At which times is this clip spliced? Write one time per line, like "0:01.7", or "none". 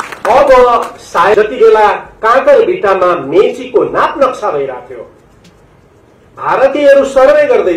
0:01.3